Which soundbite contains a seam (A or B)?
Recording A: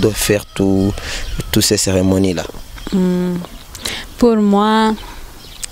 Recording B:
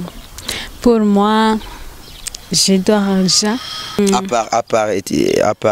B